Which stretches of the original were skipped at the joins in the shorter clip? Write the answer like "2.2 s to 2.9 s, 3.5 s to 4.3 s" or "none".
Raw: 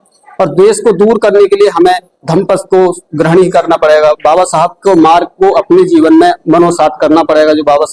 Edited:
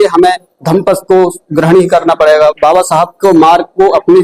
none